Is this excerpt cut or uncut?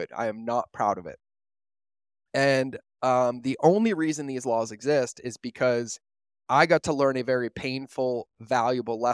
uncut